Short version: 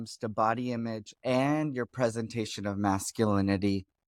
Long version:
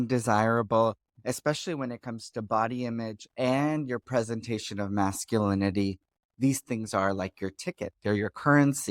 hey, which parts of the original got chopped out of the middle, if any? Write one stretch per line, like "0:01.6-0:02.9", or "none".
none